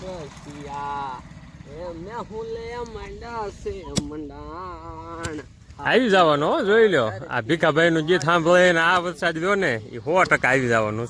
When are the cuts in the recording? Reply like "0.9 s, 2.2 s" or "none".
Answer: none